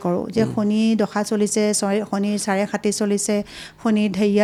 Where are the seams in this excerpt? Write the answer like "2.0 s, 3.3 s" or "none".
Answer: none